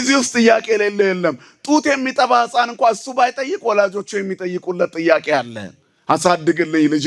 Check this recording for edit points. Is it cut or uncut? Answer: uncut